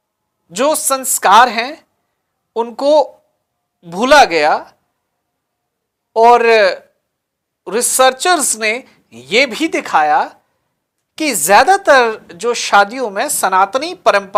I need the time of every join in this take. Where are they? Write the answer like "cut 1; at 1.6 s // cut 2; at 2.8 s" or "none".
none